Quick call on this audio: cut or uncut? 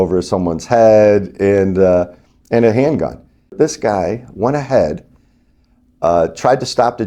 cut